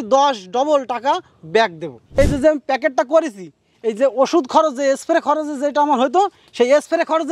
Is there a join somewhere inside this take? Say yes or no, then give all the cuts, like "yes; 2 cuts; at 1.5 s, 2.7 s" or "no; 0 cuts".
yes; 1 cut; at 2.1 s